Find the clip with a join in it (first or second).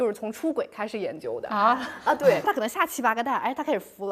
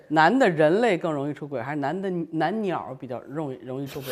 first